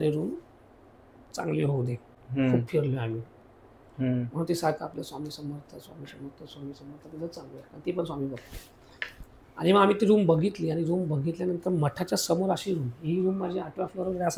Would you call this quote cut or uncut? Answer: uncut